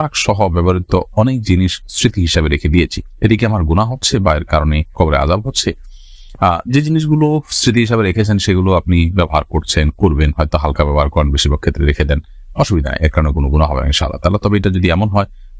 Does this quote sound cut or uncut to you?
uncut